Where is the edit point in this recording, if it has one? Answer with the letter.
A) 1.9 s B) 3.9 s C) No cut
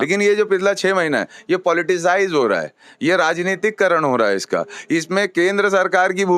C